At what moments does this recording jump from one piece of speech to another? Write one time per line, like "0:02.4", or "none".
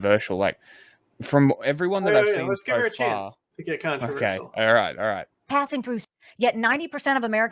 0:06.1